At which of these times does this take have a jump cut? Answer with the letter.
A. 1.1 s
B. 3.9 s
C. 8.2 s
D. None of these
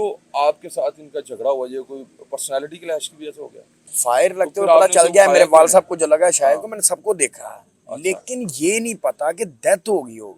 B